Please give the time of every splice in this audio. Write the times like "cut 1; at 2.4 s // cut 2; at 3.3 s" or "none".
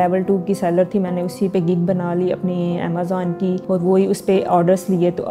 cut 1; at 3.6 s